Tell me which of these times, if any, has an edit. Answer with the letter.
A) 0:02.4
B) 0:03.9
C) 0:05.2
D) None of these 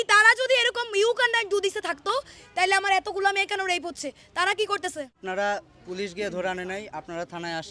C